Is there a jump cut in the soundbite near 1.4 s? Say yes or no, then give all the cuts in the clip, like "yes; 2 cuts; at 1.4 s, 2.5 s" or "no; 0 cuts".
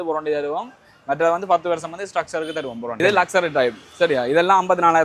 no; 1 cut; at 3.0 s